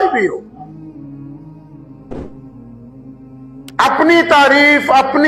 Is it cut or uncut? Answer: uncut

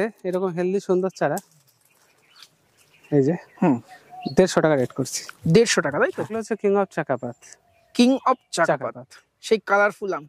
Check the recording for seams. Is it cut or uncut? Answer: cut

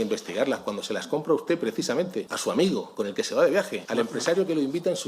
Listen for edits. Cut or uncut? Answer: cut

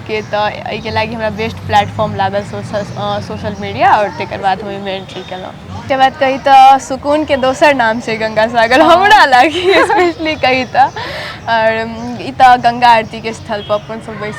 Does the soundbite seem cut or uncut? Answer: cut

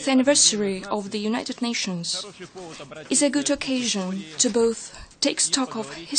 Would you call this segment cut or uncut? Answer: cut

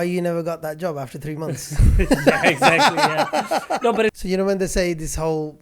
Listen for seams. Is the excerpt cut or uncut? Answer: cut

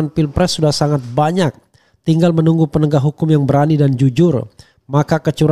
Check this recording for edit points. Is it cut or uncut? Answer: uncut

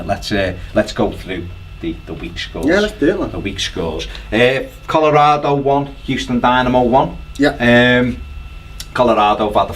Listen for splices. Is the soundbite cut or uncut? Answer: cut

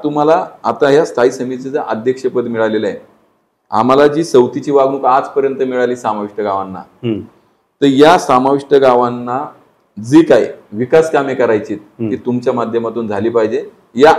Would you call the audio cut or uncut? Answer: uncut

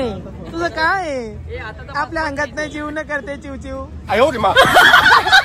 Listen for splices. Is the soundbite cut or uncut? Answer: uncut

